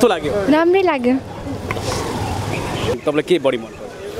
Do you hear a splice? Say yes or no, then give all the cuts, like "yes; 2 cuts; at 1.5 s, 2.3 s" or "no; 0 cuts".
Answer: yes; 1 cut; at 3.0 s